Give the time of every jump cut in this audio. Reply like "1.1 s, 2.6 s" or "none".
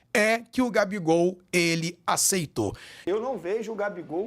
3.0 s